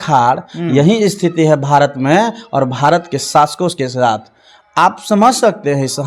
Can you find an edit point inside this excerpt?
no; 0 cuts

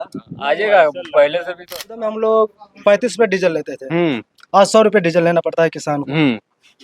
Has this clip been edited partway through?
yes; 1 cut; at 1.7 s

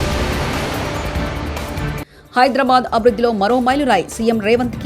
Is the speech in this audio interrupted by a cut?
yes; 1 cut; at 2.1 s

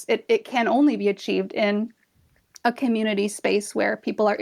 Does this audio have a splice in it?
no; 0 cuts

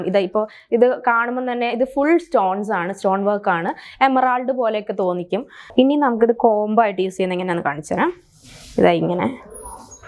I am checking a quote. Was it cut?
yes; 1 cut; at 5.6 s

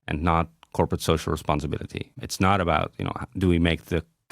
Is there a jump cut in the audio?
yes; 1 cut; at 2.2 s

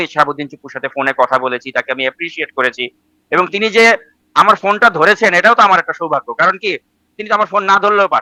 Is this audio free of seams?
yes; 0 cuts

